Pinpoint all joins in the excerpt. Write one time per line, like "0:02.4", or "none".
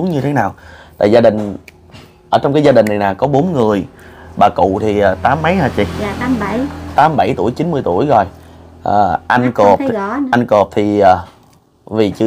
none